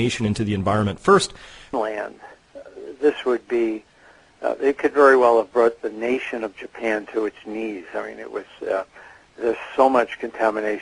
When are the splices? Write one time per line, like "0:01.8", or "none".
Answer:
none